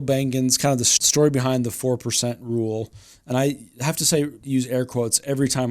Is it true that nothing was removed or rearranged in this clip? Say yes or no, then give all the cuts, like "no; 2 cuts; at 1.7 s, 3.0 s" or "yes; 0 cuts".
no; 2 cuts; at 0.9 s, 4.4 s